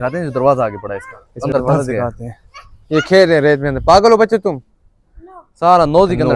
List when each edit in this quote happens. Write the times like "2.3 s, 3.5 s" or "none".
none